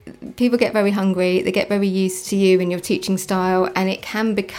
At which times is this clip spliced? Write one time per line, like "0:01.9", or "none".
0:02.2